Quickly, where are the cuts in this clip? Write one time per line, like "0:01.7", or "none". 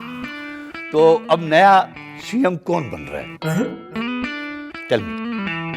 none